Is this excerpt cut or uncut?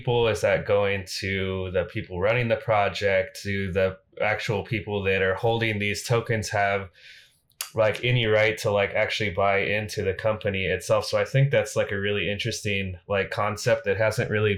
uncut